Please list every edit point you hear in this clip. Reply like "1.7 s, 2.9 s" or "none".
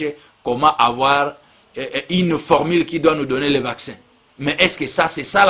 none